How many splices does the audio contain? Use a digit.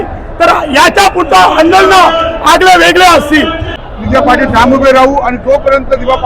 1